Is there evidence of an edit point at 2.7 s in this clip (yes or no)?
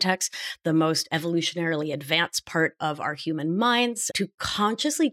no